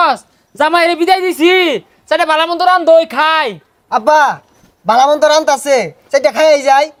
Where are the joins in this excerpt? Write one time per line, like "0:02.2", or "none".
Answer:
none

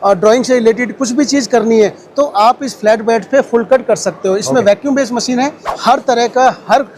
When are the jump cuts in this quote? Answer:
0:05.6

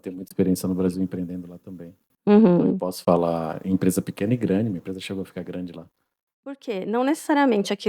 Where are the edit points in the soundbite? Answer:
0:06.2

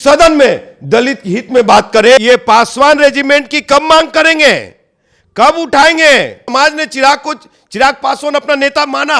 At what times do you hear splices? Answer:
0:02.2
0:06.4

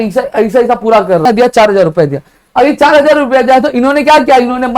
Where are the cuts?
0:01.2

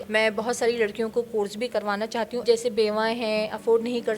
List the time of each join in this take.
0:01.7

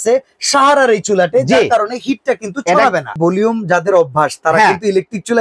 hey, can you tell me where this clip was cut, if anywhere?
0:03.1

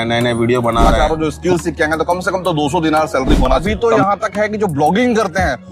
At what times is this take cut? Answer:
0:00.9
0:03.6

